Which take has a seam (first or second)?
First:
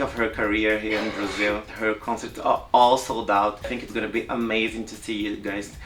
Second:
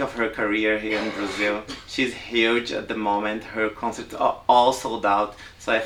first